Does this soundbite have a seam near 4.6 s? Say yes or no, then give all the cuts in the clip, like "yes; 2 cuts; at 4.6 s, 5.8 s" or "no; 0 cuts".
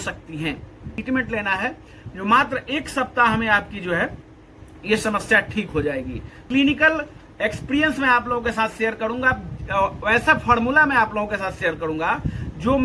no; 2 cuts; at 1.0 s, 6.4 s